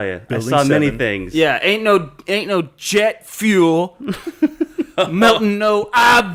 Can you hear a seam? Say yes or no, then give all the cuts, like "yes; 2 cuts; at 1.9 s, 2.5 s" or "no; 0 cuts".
no; 0 cuts